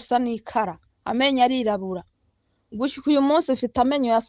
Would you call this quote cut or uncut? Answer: uncut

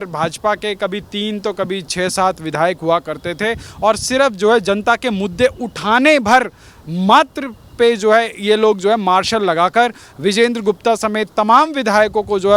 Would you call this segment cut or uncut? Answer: uncut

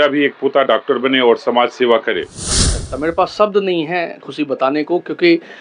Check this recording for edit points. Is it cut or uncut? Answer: cut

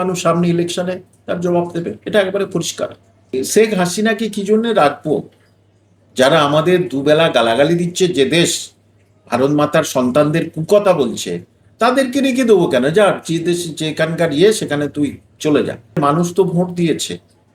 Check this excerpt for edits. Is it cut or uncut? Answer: cut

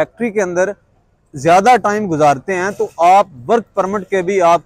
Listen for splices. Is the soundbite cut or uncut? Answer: uncut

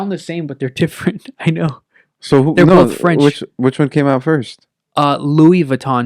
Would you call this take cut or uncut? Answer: uncut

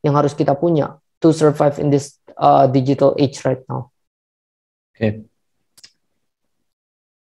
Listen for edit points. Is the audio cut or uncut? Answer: uncut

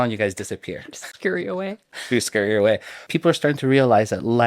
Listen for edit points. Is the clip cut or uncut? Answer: cut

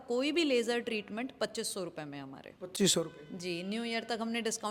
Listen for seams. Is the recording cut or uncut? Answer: uncut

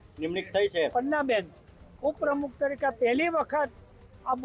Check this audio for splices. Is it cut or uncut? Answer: cut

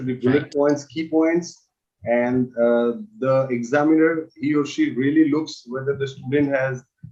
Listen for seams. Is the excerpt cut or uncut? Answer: uncut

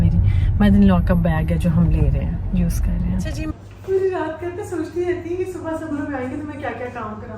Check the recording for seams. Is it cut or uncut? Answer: cut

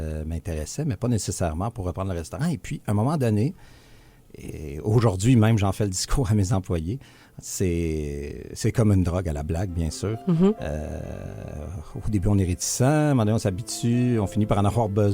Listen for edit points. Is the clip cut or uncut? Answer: uncut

